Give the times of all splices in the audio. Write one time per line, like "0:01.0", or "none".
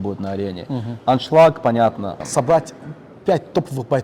0:02.1